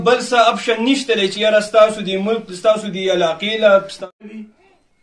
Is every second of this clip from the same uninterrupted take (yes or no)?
no